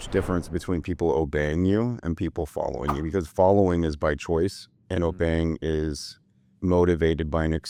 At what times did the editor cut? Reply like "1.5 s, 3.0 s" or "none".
none